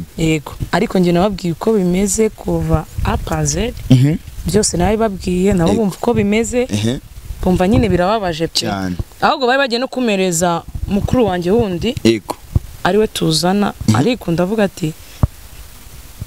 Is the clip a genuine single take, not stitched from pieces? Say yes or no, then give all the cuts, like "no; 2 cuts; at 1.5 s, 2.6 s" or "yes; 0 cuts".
yes; 0 cuts